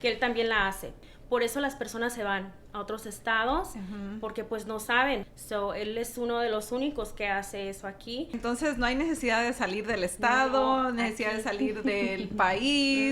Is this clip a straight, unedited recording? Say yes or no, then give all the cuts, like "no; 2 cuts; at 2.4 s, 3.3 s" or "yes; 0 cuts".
no; 3 cuts; at 1.0 s, 5.3 s, 8.3 s